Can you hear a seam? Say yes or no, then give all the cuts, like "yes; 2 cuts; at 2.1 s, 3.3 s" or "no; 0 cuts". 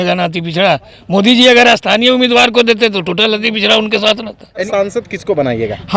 yes; 1 cut; at 4.6 s